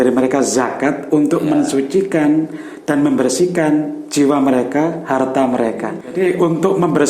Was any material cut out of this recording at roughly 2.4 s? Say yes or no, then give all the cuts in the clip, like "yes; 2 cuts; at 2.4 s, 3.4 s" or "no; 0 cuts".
no; 1 cut; at 6.1 s